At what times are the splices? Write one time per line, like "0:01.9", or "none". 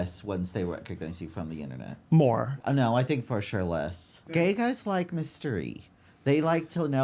0:02.5
0:04.4